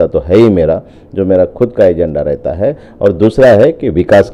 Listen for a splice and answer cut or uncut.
uncut